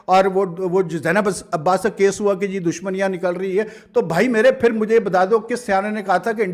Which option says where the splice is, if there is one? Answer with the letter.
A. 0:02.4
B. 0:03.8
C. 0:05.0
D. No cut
D